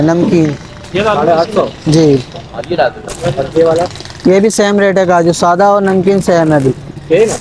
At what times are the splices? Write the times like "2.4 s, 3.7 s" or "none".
none